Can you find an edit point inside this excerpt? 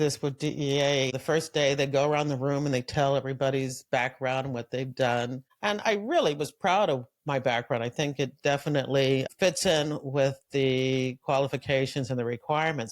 yes; 3 cuts; at 1.2 s, 5.5 s, 9.3 s

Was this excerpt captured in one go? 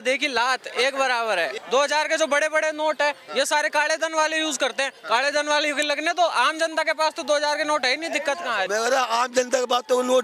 no; 2 cuts; at 1.6 s, 8.7 s

